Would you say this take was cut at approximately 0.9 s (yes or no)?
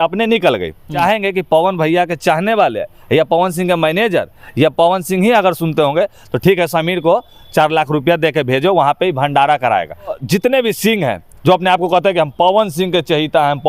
yes